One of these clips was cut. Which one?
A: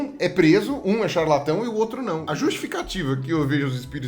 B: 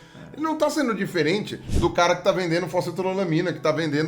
A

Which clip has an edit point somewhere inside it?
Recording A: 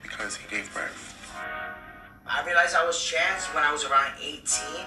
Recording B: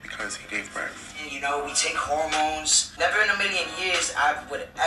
B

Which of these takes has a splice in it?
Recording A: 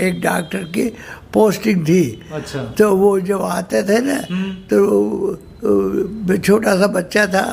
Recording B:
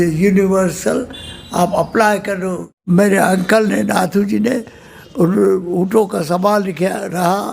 B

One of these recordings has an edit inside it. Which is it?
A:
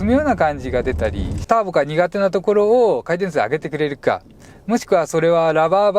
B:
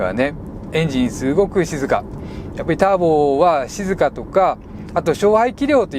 A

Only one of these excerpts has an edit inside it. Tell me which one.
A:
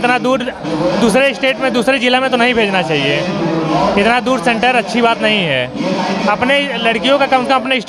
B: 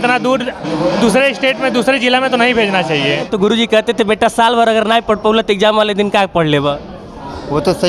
B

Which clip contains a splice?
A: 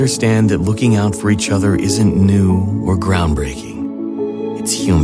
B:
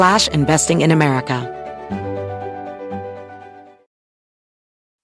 B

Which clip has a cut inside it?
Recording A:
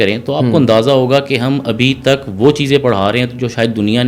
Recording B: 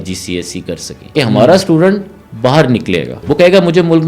B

